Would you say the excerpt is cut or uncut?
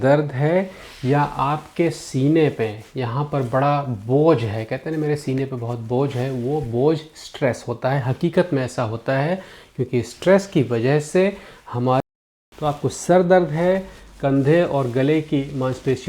cut